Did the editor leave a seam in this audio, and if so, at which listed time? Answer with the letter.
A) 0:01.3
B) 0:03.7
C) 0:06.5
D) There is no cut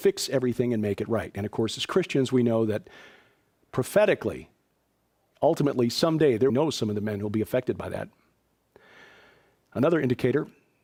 D